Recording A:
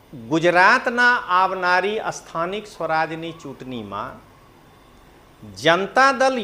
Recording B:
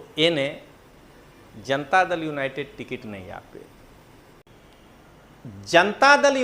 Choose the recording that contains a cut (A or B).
B